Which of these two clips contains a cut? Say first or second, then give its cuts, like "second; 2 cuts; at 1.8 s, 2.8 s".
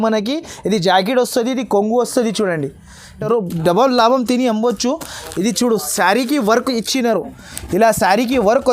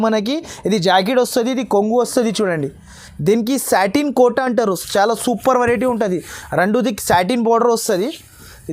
first; 1 cut; at 3.0 s